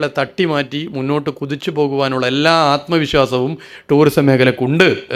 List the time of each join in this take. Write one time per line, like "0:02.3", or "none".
none